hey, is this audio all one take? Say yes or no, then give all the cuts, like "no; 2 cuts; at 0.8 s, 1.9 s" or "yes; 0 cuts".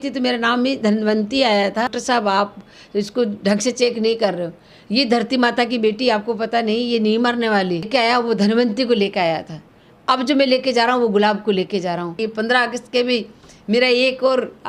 no; 3 cuts; at 2.0 s, 7.9 s, 12.2 s